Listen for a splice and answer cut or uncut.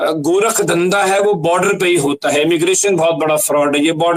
uncut